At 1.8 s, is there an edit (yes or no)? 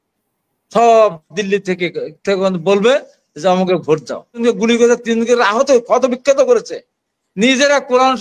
no